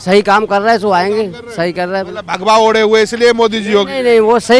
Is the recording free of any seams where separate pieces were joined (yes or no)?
yes